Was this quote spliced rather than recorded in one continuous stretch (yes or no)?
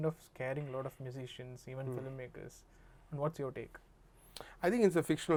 no